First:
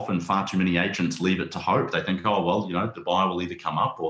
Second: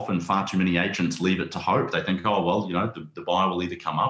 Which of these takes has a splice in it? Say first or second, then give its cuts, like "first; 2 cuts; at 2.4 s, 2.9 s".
first; 1 cut; at 2.9 s